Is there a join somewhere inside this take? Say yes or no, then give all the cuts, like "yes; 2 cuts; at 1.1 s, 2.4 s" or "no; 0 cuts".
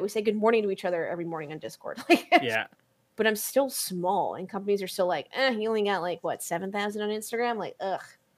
yes; 1 cut; at 2.7 s